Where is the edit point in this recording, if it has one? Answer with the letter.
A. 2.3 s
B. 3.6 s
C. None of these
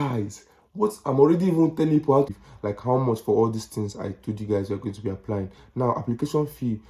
A